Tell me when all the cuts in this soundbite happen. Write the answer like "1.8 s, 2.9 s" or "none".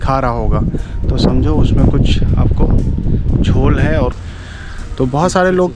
4.1 s

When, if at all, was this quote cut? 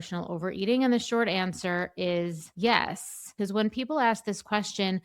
2.4 s, 3.3 s

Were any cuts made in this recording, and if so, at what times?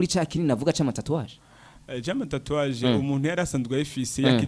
none

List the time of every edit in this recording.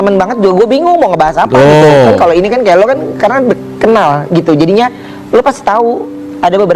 none

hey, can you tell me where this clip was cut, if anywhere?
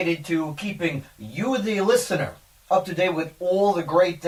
none

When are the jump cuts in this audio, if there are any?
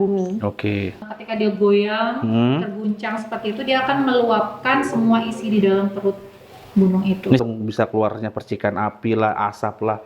1.0 s, 7.4 s

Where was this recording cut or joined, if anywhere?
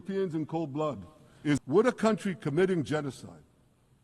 1.6 s

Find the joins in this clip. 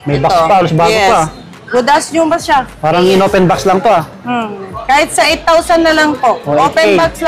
none

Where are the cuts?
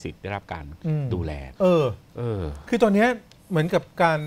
1.5 s

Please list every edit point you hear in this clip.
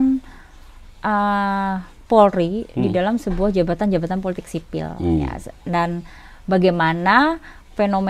none

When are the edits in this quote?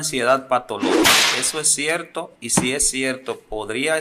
1.2 s

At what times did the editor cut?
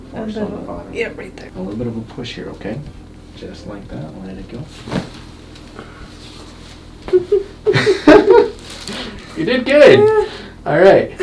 1.4 s

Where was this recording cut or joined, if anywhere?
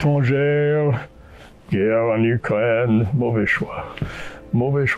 none

